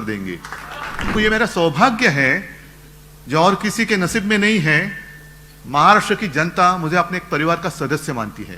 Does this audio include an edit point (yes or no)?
yes